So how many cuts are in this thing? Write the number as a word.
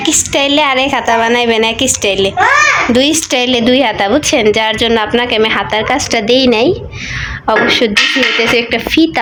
zero